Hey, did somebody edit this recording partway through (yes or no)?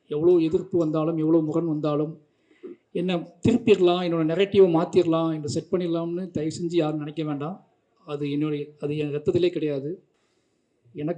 no